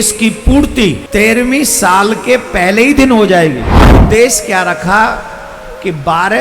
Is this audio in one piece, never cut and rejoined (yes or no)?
no